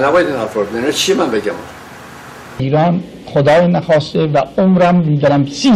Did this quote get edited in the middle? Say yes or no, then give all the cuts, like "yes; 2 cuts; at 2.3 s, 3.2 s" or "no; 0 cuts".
yes; 1 cut; at 2.6 s